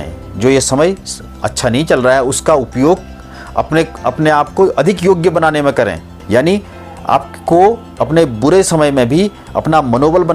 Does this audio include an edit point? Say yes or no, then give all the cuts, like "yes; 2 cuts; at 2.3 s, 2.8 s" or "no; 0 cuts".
yes; 1 cut; at 6.1 s